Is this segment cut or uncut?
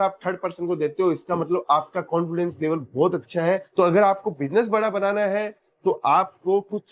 cut